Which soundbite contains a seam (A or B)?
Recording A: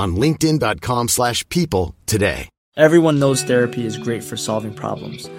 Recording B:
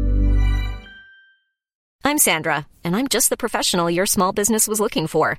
B